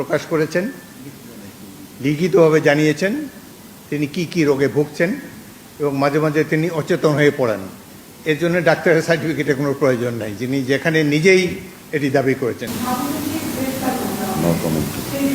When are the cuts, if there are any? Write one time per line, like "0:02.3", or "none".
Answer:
0:12.7